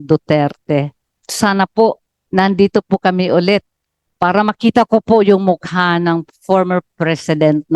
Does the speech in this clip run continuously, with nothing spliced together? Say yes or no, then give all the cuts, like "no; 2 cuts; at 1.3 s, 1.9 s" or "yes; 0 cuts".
no; 1 cut; at 1.2 s